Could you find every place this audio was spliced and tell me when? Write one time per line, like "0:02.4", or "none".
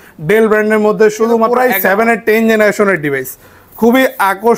0:01.5